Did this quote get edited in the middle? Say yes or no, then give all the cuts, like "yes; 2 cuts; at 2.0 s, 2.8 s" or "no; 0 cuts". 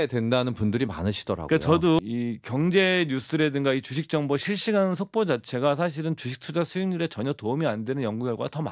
yes; 1 cut; at 2.0 s